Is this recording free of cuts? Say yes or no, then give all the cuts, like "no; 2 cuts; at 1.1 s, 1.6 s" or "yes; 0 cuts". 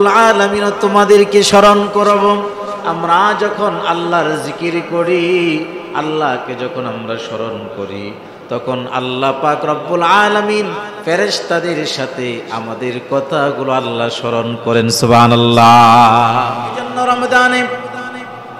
no; 1 cut; at 16.9 s